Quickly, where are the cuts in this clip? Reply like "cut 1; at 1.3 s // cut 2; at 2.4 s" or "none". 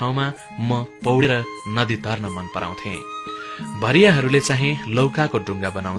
cut 1; at 1.2 s